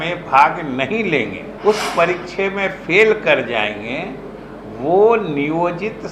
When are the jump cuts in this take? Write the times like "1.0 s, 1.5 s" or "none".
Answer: 1.5 s